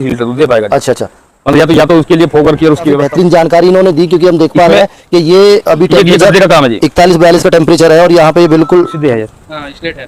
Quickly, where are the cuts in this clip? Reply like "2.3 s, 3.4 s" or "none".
3.0 s, 8.9 s